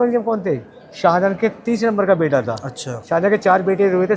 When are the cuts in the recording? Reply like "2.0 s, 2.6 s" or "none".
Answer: none

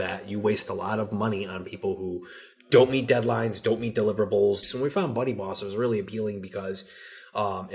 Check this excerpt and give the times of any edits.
4.6 s

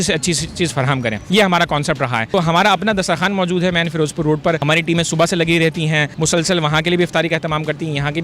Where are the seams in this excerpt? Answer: 1.2 s, 2.3 s, 4.6 s, 6.1 s

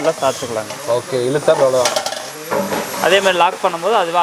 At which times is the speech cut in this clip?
none

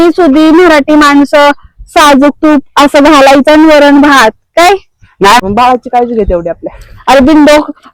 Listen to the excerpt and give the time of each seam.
5.4 s

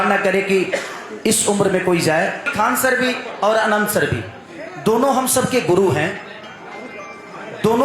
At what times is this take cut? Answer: 2.5 s

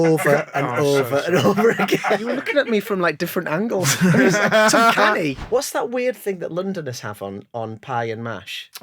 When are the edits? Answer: 2.2 s, 5.4 s

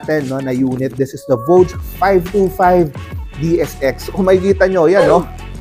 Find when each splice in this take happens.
none

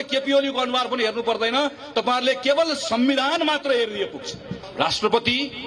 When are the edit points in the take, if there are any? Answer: 4.6 s

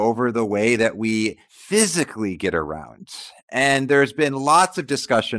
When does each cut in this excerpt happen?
1.5 s

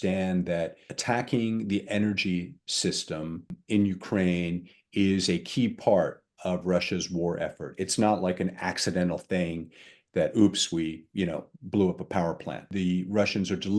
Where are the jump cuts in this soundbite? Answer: 0.9 s, 3.6 s, 12.7 s

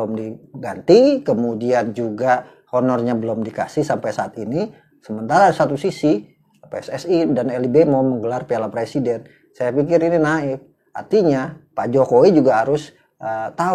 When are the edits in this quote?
none

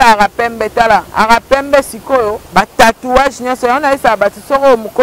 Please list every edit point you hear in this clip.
1.1 s, 2.4 s

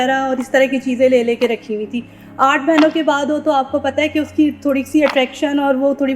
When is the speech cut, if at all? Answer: none

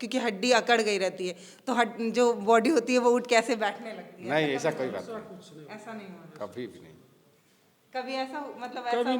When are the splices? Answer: none

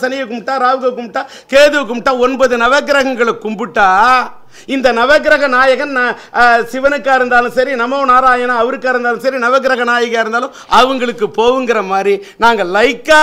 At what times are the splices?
none

